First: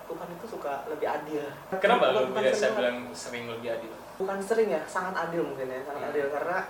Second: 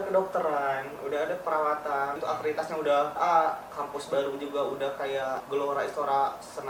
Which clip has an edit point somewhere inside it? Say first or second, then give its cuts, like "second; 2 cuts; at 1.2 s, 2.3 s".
second; 3 cuts; at 2.2 s, 3.2 s, 5.4 s